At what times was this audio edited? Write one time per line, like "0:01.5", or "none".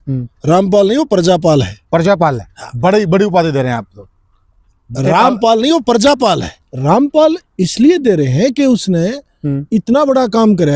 0:06.5